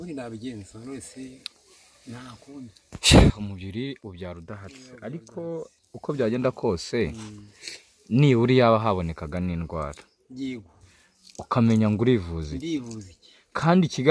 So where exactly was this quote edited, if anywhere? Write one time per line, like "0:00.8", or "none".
none